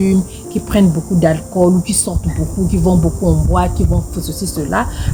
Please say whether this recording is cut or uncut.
uncut